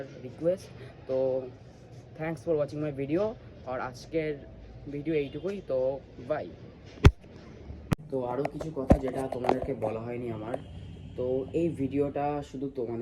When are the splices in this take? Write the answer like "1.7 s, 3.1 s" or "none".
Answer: 8.0 s